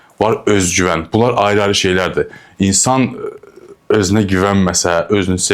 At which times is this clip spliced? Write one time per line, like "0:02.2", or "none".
none